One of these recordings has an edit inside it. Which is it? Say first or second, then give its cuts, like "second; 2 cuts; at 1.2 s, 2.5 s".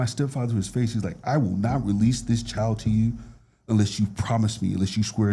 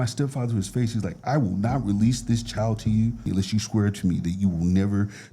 second; 1 cut; at 3.3 s